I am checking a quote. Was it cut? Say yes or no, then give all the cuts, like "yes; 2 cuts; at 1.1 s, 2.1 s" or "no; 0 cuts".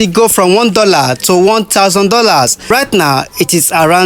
yes; 1 cut; at 2.7 s